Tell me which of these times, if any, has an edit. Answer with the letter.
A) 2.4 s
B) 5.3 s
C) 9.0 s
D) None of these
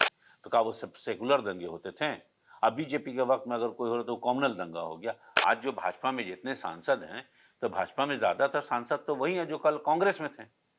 B